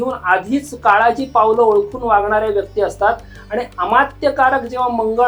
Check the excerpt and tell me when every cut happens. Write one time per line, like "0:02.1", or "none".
none